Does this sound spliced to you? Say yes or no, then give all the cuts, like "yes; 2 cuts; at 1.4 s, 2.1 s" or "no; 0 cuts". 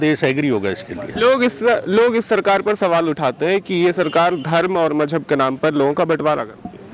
no; 0 cuts